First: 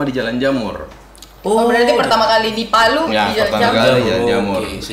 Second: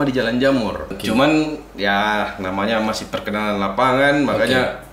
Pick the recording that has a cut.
second; 1 cut; at 0.9 s

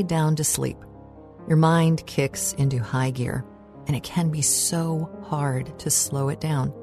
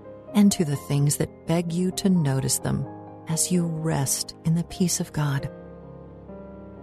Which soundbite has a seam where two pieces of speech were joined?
second; 1 cut; at 5.4 s

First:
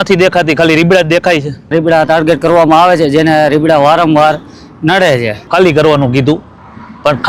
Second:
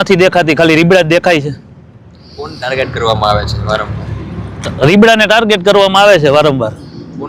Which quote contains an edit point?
first; 2 cuts; at 1.7 s, 5.4 s

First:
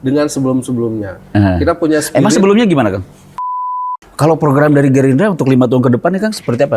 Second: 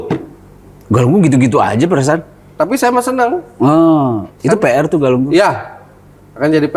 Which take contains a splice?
first; 1 cut; at 3.7 s

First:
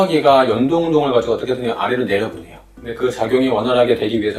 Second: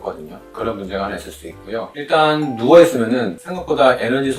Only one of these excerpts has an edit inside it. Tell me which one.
second; 1 cut; at 1.9 s

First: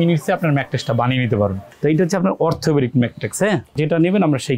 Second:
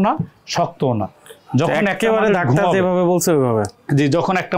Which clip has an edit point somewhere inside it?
first; 2 cuts; at 1.7 s, 3.8 s

